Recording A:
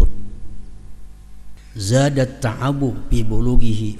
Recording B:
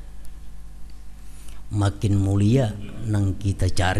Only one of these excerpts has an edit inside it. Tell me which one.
A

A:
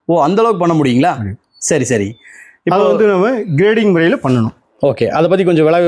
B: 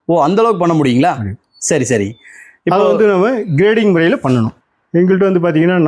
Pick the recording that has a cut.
B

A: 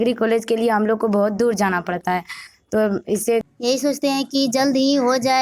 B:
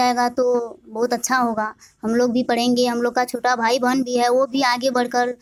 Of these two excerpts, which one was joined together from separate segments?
A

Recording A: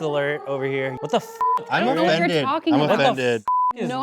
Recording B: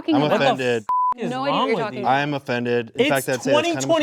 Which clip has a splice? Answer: A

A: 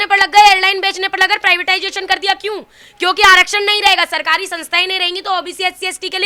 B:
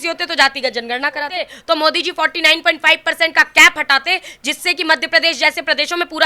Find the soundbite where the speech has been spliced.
B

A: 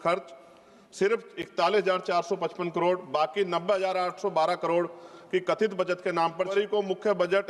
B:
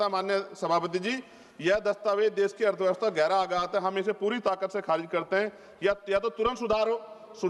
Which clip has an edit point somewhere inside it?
A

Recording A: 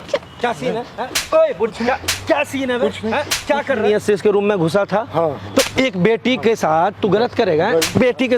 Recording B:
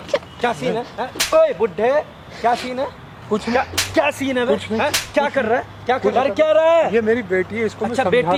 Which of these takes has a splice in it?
A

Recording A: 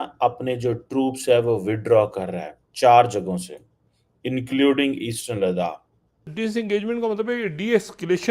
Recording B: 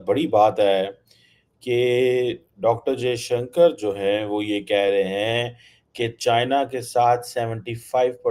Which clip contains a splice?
A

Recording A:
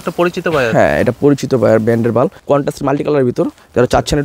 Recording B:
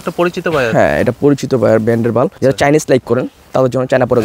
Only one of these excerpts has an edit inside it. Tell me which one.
B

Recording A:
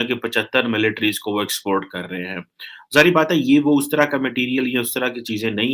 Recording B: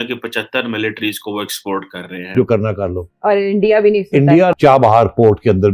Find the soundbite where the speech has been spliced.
B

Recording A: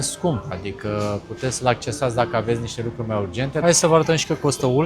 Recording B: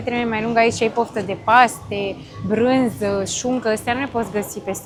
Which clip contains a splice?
A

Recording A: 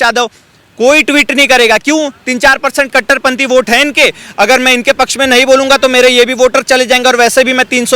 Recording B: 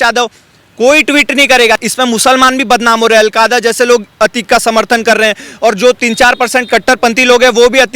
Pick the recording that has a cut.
B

